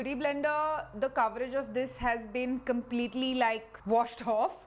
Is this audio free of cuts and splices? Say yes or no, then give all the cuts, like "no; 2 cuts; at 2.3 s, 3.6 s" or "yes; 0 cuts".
yes; 0 cuts